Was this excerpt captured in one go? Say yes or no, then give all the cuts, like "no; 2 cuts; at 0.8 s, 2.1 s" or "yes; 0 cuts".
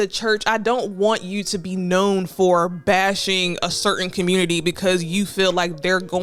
yes; 0 cuts